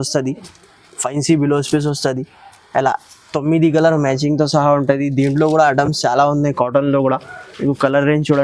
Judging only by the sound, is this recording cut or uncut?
uncut